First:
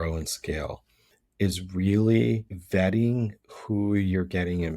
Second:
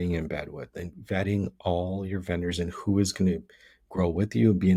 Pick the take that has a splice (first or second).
first